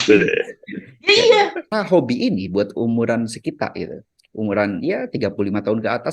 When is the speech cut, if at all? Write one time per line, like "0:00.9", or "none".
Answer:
0:01.7